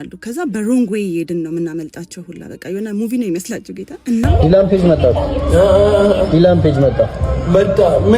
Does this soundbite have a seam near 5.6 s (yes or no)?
no